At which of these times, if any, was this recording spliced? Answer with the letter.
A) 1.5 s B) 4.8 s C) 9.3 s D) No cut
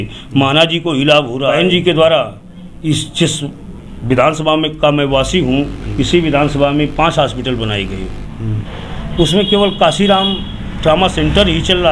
A